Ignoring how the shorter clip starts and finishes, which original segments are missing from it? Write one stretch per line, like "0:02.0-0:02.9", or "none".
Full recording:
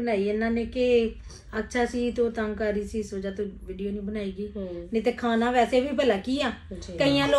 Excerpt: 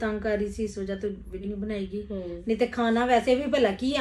0:03.8-0:03.9